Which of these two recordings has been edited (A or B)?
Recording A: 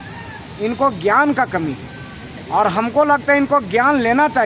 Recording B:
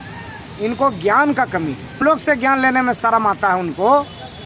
B